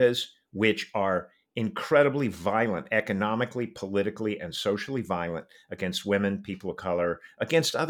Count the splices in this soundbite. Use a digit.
0